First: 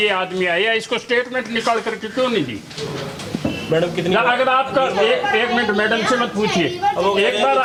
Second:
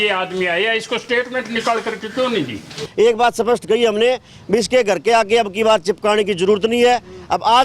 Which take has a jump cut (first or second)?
second